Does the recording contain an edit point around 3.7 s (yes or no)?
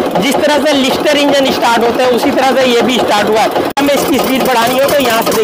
yes